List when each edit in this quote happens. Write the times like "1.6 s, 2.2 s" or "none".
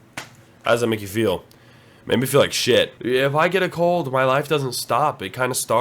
3.0 s